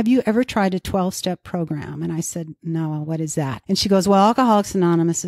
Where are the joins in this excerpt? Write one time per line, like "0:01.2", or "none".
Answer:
0:03.6